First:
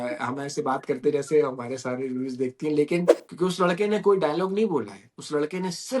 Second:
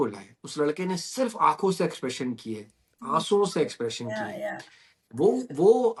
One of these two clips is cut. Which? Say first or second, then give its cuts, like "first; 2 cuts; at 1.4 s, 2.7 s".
first; 1 cut; at 3.2 s